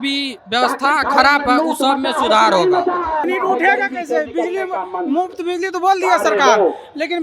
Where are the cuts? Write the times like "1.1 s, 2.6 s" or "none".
3.2 s

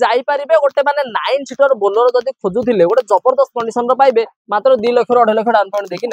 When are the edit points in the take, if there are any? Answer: none

